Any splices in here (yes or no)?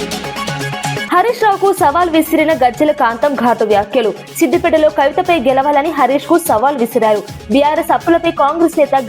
yes